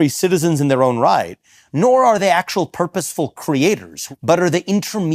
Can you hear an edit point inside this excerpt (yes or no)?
yes